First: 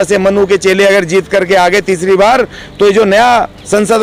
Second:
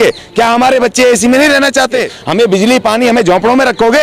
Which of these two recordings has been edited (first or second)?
second